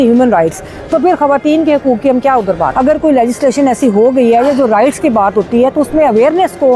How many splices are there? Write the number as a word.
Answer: one